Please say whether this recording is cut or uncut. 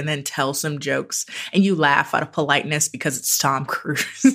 uncut